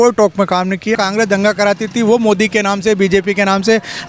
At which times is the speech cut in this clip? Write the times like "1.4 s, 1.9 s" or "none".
1.0 s